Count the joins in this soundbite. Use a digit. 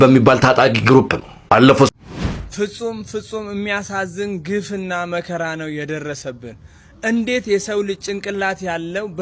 1